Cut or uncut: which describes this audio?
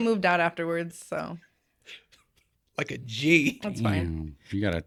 uncut